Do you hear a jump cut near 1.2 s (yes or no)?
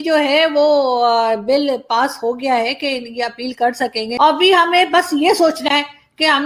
no